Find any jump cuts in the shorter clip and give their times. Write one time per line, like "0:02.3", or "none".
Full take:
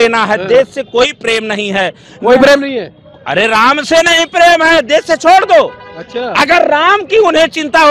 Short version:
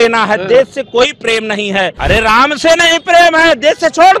0:02.0